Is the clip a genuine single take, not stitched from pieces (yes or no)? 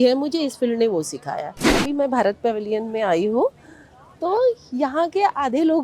no